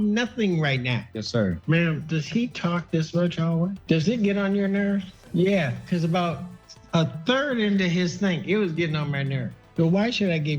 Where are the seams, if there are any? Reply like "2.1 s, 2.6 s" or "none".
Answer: 1.6 s, 3.8 s, 9.5 s